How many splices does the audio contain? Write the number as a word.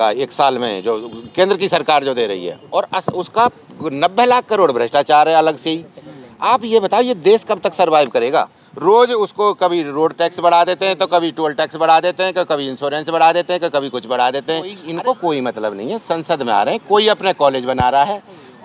two